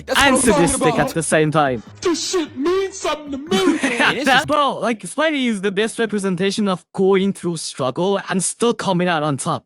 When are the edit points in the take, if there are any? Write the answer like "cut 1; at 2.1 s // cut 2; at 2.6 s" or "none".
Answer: cut 1; at 4.4 s